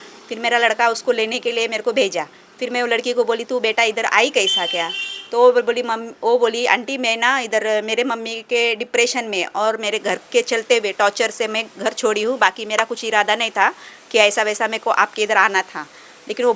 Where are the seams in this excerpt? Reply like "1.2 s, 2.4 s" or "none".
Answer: none